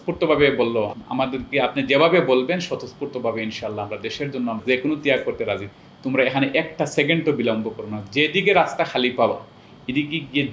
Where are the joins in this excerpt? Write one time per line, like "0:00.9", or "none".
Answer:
0:00.9
0:04.6
0:05.7